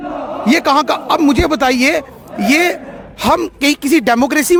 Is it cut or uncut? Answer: uncut